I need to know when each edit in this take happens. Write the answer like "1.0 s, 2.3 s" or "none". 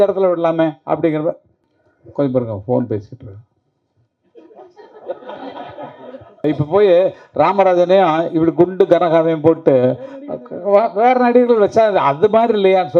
6.4 s